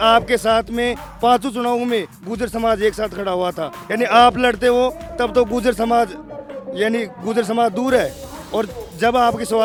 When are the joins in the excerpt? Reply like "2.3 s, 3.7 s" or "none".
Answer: none